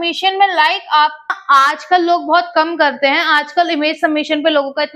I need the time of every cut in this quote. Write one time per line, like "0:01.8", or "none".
0:01.4